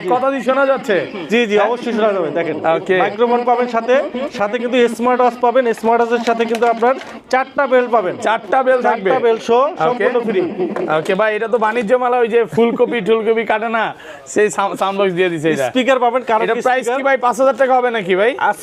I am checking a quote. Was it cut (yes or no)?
no